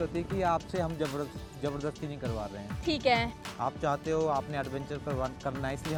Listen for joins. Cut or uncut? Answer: uncut